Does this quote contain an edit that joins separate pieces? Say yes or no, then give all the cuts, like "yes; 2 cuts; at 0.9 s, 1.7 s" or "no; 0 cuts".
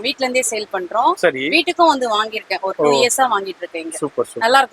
no; 0 cuts